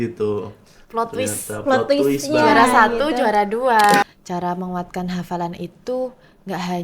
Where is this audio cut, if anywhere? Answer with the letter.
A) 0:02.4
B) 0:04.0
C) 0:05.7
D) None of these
B